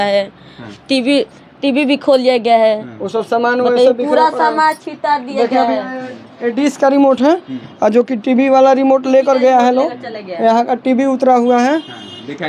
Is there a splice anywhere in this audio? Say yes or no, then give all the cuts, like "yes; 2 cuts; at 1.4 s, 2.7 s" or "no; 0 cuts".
no; 0 cuts